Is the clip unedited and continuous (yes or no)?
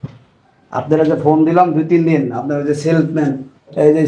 yes